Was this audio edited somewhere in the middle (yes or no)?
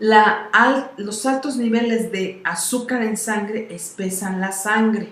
yes